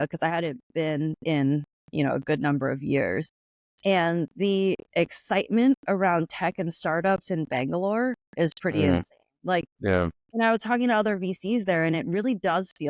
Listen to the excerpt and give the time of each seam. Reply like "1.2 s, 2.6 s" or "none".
none